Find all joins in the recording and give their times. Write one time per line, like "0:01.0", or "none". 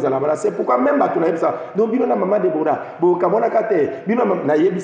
none